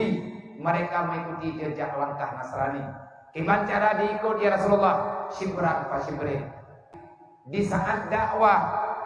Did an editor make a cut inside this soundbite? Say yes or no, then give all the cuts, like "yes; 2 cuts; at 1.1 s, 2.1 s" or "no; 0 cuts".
yes; 1 cut; at 6.9 s